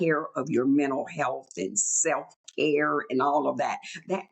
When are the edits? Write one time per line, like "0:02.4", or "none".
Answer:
none